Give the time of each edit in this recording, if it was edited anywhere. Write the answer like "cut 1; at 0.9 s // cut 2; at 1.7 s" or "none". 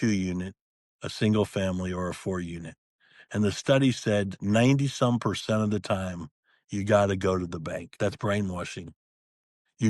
cut 1; at 7.9 s